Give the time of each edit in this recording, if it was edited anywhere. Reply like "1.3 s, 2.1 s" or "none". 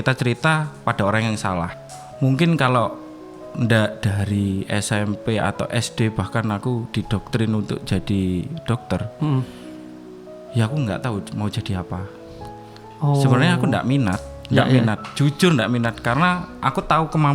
1.7 s

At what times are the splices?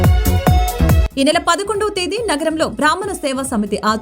1.0 s

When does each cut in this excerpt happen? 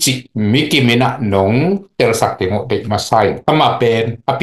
3.4 s

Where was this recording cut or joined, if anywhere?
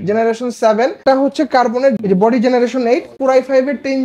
1.0 s, 2.0 s, 3.1 s

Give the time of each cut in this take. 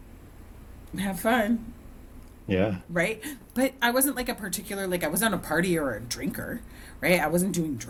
none

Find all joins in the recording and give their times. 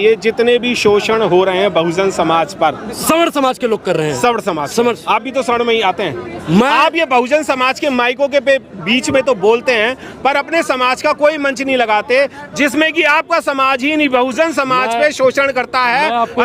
none

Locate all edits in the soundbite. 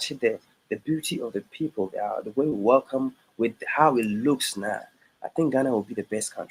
none

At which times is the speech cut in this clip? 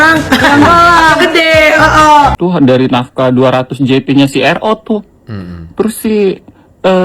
2.4 s

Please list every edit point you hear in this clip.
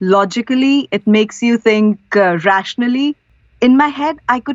3.2 s

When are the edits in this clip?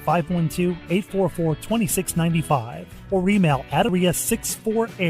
3.9 s

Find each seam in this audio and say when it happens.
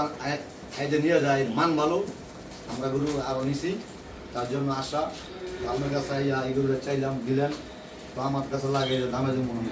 none

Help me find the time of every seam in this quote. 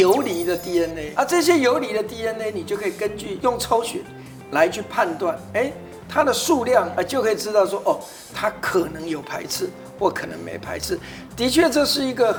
none

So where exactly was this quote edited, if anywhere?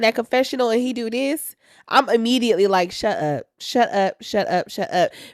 none

